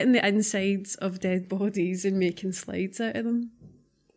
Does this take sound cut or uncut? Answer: uncut